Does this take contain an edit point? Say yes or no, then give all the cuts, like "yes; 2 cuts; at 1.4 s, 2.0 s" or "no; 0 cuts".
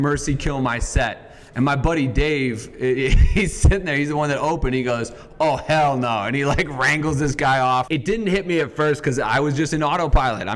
no; 0 cuts